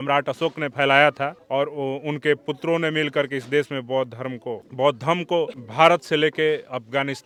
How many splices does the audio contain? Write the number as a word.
zero